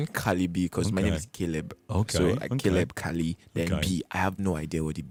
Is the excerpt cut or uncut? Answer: uncut